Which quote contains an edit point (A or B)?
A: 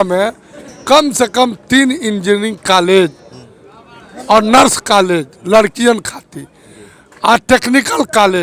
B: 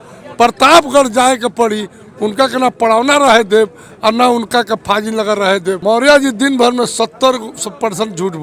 B